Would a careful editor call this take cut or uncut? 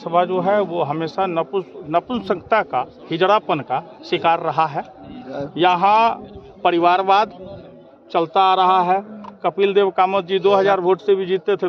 uncut